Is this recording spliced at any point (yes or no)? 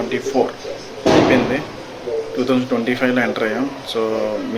no